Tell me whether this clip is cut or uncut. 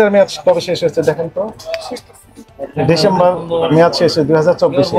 uncut